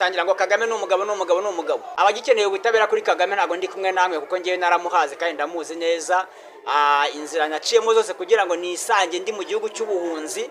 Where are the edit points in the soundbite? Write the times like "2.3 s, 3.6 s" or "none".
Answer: 1.9 s